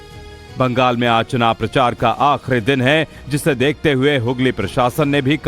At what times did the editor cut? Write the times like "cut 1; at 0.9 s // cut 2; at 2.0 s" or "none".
cut 1; at 4.2 s